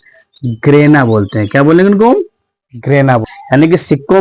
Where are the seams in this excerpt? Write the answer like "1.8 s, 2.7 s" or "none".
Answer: 3.2 s